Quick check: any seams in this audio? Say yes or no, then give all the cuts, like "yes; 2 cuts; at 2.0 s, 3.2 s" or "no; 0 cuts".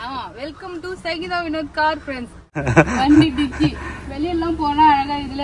yes; 1 cut; at 2.6 s